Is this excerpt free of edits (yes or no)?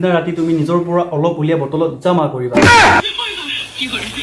no